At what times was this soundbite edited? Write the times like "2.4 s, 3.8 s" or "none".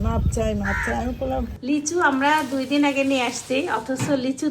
1.5 s